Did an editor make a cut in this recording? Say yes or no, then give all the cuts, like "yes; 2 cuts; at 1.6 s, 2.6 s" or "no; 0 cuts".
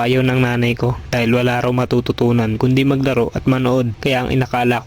yes; 1 cut; at 3.9 s